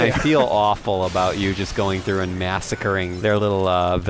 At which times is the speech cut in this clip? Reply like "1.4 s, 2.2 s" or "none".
3.1 s